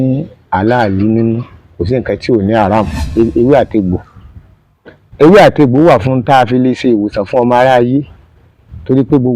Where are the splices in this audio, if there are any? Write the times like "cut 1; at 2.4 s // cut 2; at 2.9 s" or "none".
cut 1; at 3.1 s